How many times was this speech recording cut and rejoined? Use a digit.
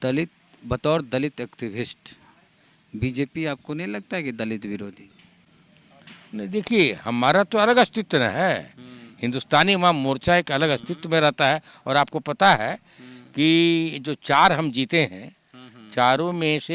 0